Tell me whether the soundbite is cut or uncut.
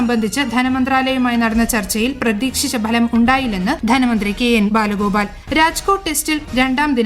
cut